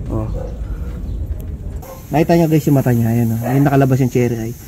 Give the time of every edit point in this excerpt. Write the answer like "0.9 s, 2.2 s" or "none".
1.7 s